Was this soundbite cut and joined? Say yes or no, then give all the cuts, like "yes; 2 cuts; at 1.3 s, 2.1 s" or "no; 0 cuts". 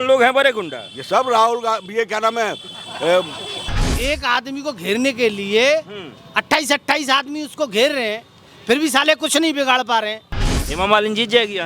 yes; 2 cuts; at 3.9 s, 10.6 s